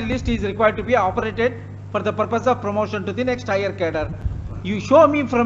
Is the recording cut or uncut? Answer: uncut